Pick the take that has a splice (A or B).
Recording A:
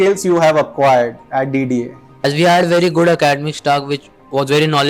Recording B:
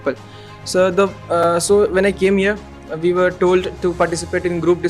A